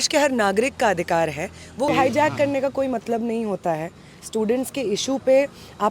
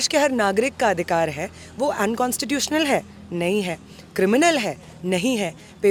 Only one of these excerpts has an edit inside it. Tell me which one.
first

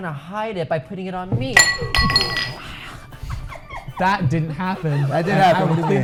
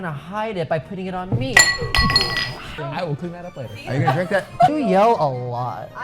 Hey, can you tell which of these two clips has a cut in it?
second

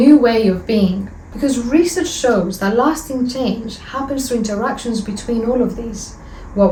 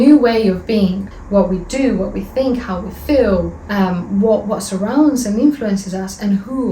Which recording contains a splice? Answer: second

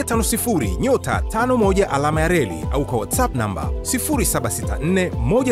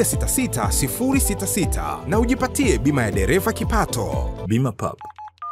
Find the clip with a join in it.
second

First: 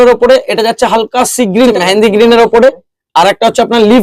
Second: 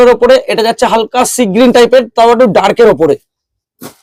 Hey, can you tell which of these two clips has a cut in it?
first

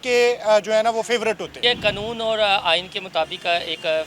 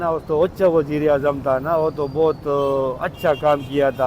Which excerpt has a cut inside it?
first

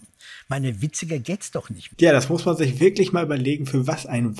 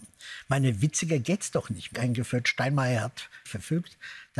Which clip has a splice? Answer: second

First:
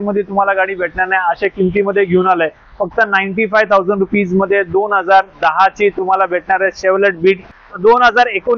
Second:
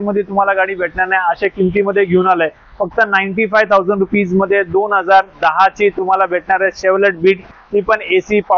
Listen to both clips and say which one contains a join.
first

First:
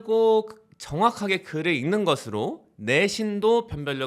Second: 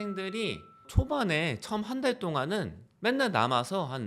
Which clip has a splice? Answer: second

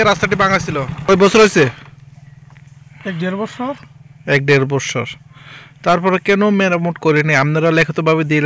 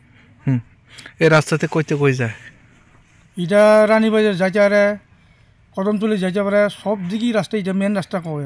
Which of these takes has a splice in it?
first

